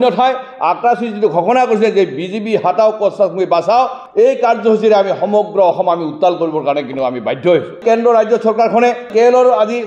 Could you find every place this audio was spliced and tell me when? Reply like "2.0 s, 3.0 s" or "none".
none